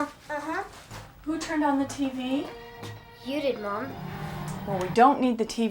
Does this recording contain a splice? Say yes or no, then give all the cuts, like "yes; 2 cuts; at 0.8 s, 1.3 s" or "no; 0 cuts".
yes; 1 cut; at 1.0 s